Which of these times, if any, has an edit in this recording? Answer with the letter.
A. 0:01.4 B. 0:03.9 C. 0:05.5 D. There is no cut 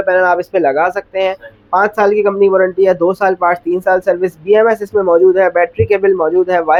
D